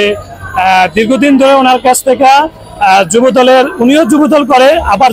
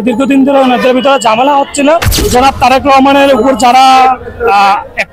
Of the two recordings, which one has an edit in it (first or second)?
second